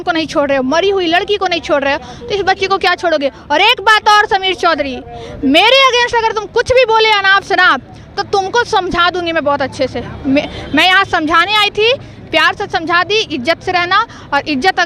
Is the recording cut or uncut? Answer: uncut